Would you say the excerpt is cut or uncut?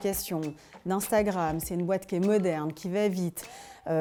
uncut